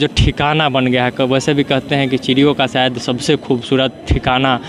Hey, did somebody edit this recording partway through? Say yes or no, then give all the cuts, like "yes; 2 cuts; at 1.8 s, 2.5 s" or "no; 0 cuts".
no; 0 cuts